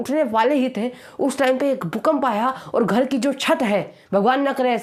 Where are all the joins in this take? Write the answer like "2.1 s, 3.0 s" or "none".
none